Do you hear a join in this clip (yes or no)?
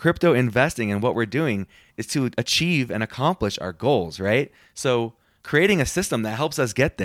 yes